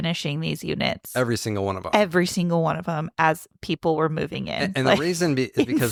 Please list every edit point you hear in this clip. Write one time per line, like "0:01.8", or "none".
none